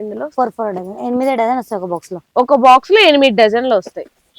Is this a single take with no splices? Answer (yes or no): yes